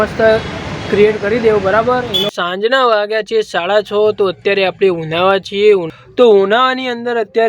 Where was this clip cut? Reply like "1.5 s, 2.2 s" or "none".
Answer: 2.3 s, 5.9 s